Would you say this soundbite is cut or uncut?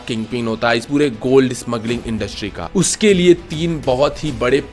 cut